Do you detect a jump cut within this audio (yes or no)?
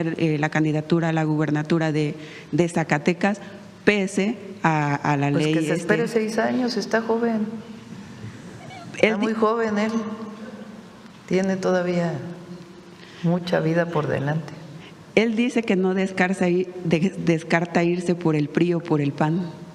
no